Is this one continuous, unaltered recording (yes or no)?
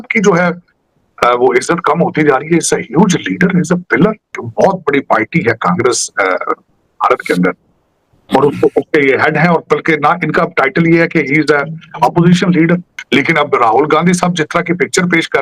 no